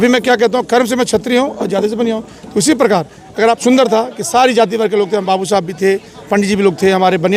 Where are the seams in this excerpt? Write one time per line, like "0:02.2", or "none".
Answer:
0:03.6

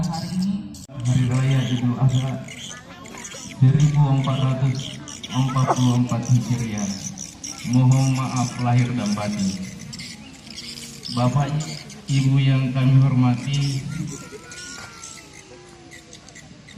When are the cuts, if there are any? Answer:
0:00.9

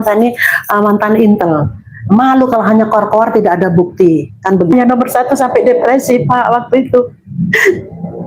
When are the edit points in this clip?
0:04.7

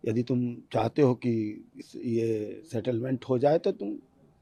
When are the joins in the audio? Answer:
none

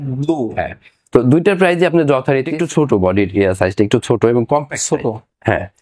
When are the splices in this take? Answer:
0:02.6

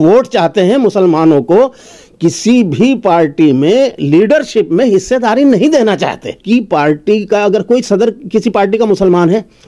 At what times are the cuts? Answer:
0:06.4

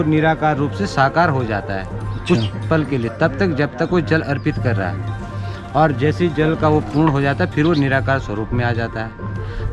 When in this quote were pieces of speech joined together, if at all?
none

